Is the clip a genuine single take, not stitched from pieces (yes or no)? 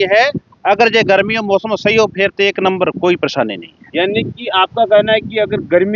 yes